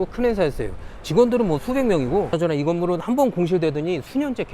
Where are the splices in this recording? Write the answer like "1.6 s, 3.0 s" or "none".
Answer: 2.3 s